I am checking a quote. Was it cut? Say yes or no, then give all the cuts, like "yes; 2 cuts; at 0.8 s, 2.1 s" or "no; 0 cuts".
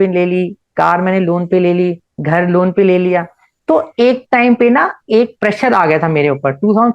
no; 0 cuts